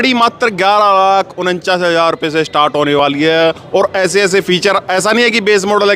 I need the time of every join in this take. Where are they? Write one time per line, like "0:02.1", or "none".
none